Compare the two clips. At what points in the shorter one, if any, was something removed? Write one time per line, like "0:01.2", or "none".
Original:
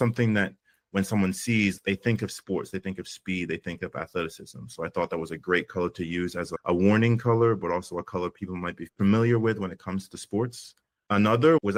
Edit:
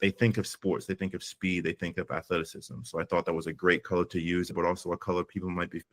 0:04.5